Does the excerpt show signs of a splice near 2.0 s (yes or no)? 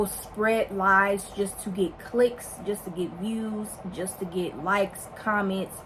no